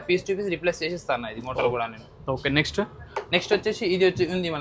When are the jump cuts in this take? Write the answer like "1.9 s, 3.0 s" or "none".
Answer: none